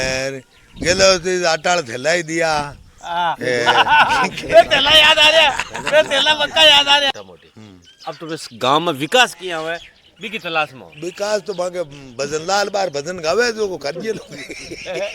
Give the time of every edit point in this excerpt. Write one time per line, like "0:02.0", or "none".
0:07.1